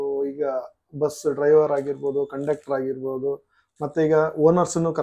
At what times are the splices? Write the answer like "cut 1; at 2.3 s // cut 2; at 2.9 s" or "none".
none